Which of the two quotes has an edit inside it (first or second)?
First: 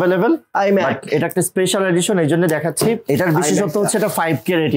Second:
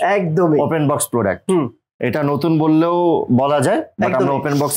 first